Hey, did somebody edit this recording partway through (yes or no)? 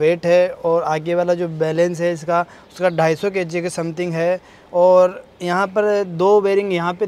no